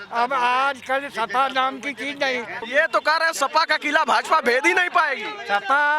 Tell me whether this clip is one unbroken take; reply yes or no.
no